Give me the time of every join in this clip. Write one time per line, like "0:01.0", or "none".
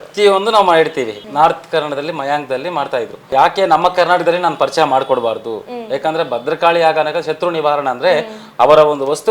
0:01.2
0:03.3